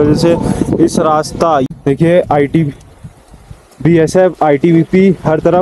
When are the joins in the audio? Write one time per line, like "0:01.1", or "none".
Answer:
0:01.7